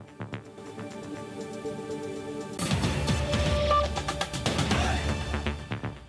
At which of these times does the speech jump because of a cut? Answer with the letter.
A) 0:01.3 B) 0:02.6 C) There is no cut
B